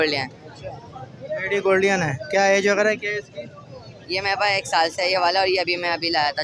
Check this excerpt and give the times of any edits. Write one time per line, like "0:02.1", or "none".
none